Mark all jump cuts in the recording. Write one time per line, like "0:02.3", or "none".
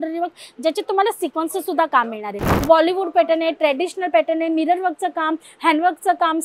0:02.5